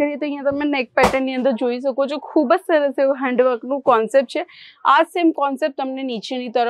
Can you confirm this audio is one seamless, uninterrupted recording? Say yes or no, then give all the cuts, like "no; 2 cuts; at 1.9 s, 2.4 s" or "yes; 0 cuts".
yes; 0 cuts